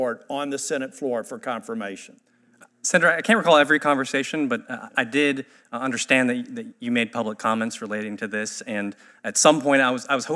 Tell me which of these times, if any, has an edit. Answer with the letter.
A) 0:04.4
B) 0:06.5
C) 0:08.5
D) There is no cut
D